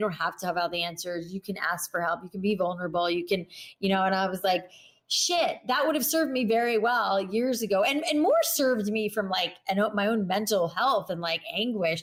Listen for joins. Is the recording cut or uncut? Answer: uncut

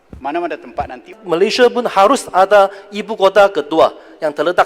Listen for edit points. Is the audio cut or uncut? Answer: cut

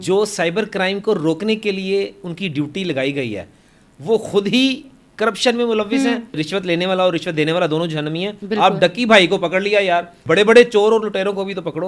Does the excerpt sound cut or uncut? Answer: cut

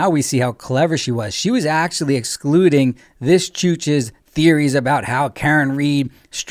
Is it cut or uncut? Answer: uncut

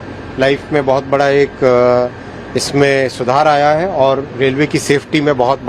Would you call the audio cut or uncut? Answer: uncut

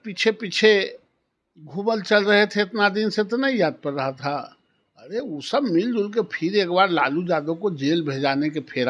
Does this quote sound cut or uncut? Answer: uncut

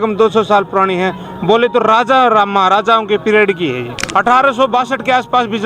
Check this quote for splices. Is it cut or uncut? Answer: cut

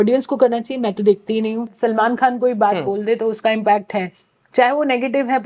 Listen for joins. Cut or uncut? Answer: cut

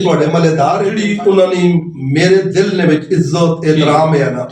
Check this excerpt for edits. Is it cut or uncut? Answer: cut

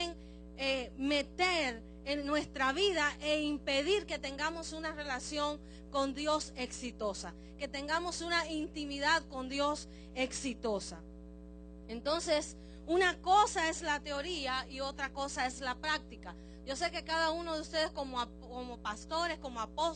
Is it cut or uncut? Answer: cut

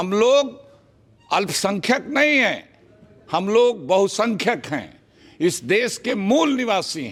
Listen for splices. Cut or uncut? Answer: uncut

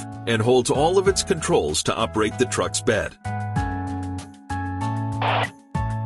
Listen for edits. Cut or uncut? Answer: uncut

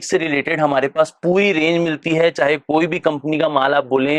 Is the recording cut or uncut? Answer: uncut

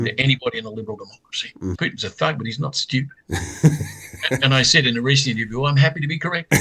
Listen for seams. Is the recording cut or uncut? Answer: cut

